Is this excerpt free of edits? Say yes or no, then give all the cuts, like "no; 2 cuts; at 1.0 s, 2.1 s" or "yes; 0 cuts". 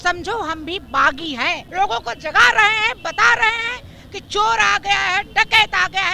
no; 1 cut; at 1.6 s